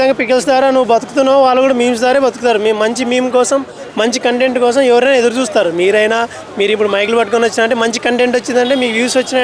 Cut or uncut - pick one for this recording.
uncut